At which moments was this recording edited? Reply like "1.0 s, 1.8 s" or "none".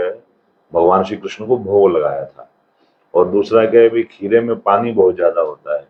none